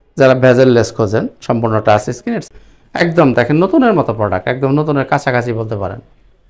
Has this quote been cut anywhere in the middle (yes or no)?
yes